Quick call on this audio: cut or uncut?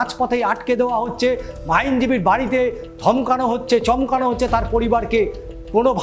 uncut